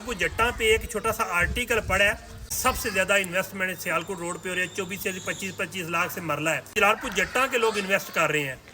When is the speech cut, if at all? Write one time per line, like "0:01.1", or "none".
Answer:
0:02.6
0:06.7